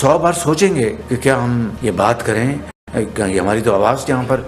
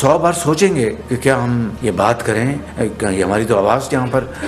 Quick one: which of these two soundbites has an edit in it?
second; 1 cut; at 2.6 s

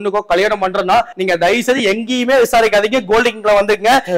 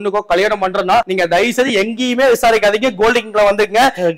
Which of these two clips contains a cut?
second; 1 cut; at 1.1 s

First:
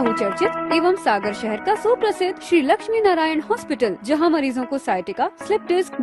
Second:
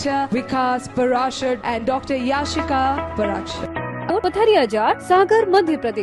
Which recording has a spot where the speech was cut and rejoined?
second; 1 cut; at 4.1 s

